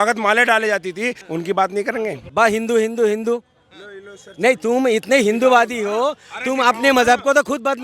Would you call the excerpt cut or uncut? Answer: cut